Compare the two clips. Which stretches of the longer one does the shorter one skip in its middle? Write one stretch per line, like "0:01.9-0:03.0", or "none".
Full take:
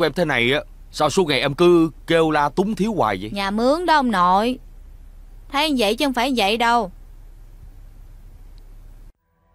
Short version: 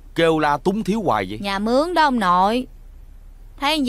none